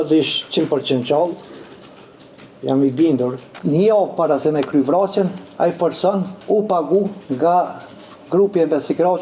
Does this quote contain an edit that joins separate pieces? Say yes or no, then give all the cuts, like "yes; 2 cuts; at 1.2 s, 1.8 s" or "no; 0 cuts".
yes; 1 cut; at 3.5 s